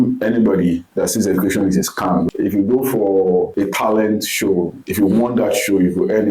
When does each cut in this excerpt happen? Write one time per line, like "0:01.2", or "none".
0:00.9
0:02.3
0:03.5
0:04.8